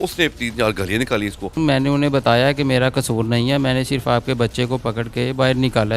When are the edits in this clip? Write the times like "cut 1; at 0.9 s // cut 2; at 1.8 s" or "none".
cut 1; at 1.6 s